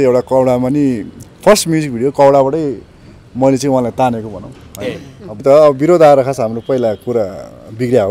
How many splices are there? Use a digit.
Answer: 1